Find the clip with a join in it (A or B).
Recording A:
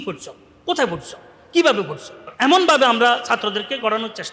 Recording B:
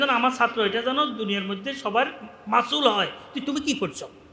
A